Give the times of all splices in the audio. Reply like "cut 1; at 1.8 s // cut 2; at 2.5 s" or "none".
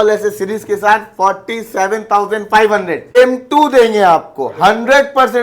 cut 1; at 3.2 s